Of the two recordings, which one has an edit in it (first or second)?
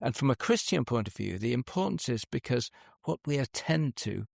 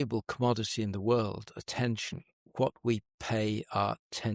first